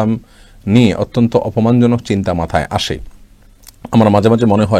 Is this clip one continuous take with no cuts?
yes; 0 cuts

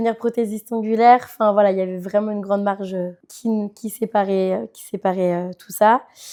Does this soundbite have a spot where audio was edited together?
no; 0 cuts

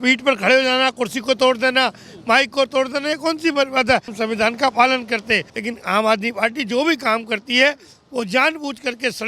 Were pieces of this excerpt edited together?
yes; 2 cuts; at 4.1 s, 5.5 s

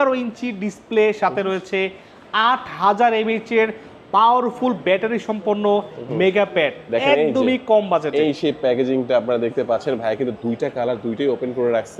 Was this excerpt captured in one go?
yes; 0 cuts

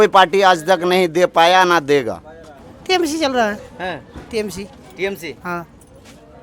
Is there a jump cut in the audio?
yes; 1 cut; at 2.6 s

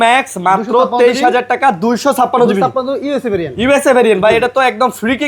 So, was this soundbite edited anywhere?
no; 0 cuts

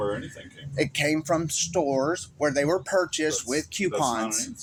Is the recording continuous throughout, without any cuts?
yes; 0 cuts

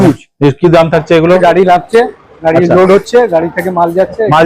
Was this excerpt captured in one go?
no; 1 cut; at 1.4 s

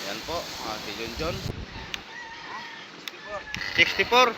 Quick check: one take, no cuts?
no; 1 cut; at 1.5 s

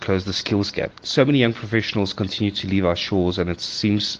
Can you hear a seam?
yes; 1 cut; at 1.0 s

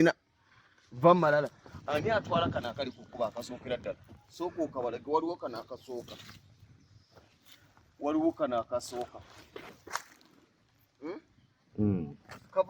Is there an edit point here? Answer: no; 0 cuts

